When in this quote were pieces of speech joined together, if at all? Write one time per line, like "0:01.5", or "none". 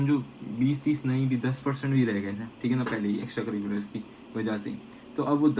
none